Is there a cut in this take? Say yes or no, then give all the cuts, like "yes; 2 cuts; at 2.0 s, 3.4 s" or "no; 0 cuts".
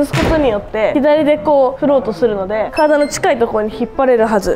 yes; 2 cuts; at 0.9 s, 2.7 s